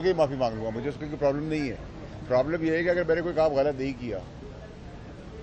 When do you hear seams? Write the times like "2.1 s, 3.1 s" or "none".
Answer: none